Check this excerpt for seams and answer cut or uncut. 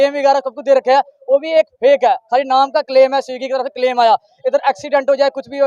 uncut